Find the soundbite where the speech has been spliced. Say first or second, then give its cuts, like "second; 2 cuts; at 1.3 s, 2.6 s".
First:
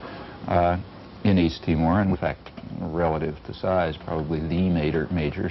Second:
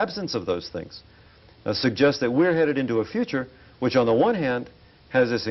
first; 1 cut; at 2.1 s